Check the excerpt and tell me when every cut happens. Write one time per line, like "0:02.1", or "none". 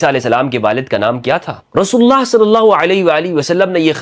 0:01.6